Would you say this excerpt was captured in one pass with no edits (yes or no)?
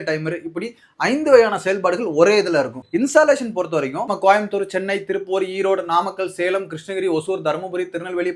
no